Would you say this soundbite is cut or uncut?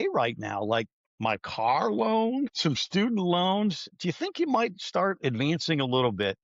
cut